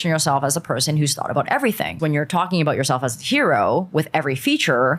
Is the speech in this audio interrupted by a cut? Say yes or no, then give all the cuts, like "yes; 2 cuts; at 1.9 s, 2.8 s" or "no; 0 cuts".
yes; 1 cut; at 2.0 s